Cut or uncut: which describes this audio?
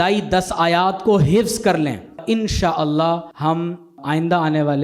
cut